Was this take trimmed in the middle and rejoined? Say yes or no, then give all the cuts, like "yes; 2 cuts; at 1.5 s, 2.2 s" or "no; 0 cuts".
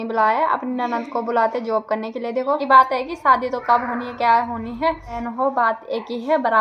yes; 2 cuts; at 2.6 s, 5.2 s